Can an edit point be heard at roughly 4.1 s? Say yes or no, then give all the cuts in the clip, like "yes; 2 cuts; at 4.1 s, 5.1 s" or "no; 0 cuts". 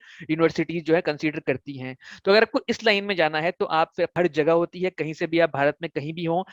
yes; 1 cut; at 4.1 s